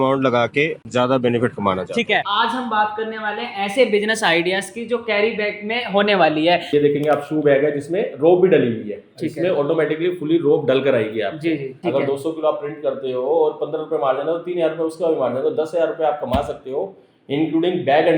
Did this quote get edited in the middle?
yes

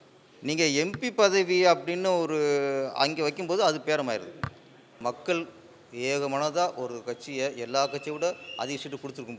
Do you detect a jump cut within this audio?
yes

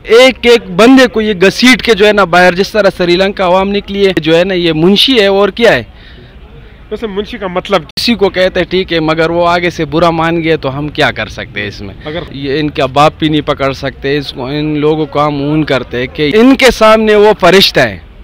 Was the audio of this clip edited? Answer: yes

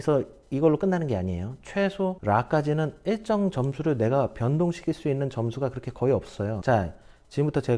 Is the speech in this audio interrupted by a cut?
yes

